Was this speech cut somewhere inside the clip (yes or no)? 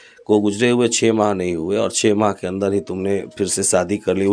no